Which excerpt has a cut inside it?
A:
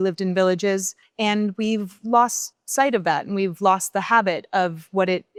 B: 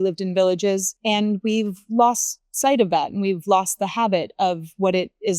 B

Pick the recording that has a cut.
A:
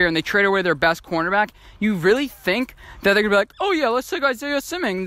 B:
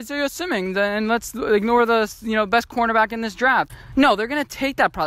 B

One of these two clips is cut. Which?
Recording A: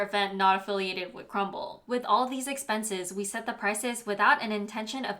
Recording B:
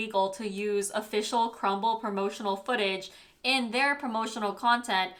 A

